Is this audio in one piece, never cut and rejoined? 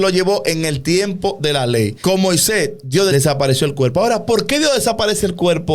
no; 2 cuts; at 2.0 s, 3.1 s

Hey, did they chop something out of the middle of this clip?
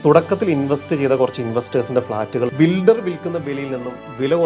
yes; 1 cut; at 2.5 s

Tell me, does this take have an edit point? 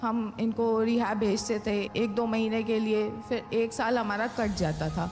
yes; 1 cut; at 1.9 s

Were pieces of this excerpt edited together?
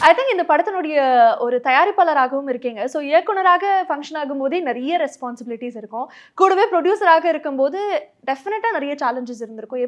no; 0 cuts

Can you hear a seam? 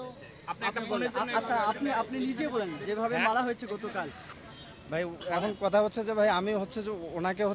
yes; 1 cut; at 4.2 s

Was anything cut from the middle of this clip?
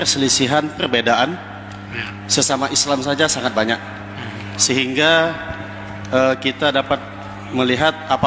no; 0 cuts

